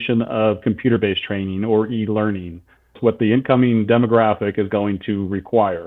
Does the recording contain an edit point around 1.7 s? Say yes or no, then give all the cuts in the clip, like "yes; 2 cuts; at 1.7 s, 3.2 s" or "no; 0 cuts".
no; 1 cut; at 2.9 s